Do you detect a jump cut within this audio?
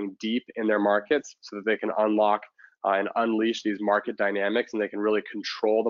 no; 0 cuts

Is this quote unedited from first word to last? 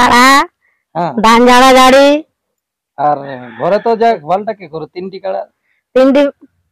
no; 1 cut; at 4.2 s

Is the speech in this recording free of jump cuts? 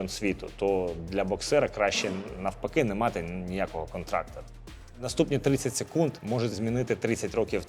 no; 2 cuts; at 4.6 s, 6.5 s

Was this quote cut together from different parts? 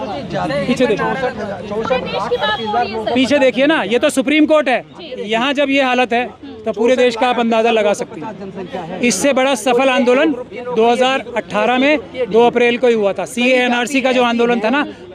no; 0 cuts

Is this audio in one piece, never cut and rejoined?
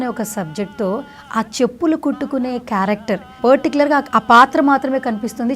no; 1 cut; at 3.3 s

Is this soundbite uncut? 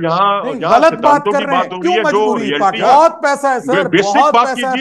no; 1 cut; at 2.8 s

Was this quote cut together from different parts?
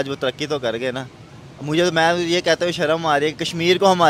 no; 0 cuts

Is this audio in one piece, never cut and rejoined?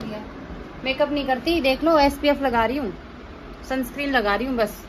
yes; 0 cuts

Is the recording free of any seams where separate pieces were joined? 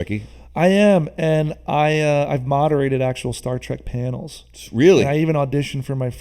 yes; 0 cuts

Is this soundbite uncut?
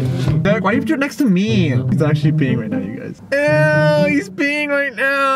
yes; 0 cuts

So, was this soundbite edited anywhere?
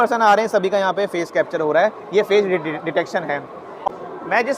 yes; 1 cut; at 3.7 s

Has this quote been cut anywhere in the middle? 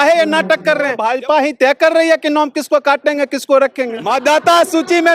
yes; 2 cuts; at 1.0 s, 4.0 s

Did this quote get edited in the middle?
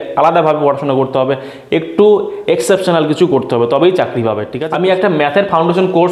yes; 1 cut; at 4.5 s

